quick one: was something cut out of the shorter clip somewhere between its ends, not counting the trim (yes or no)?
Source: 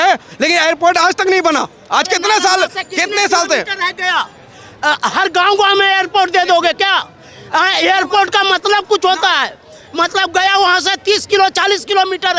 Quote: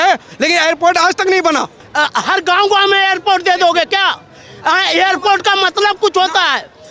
yes